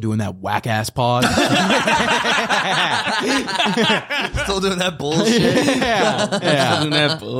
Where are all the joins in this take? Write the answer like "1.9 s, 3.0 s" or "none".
none